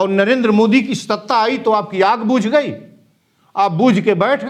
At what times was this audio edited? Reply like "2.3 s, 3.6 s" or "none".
none